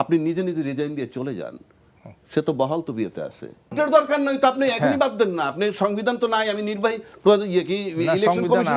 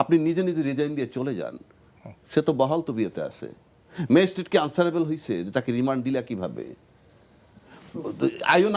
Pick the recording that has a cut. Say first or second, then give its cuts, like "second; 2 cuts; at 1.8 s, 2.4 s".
first; 1 cut; at 3.7 s